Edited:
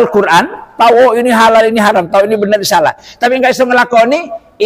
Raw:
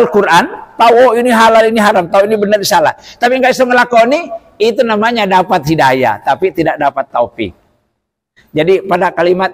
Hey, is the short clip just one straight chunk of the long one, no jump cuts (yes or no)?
yes